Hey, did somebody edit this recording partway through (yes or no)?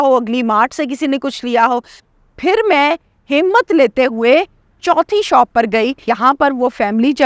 yes